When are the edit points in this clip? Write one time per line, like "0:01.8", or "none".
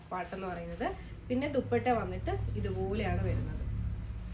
none